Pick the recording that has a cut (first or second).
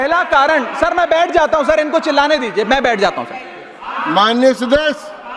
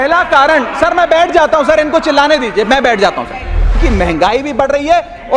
second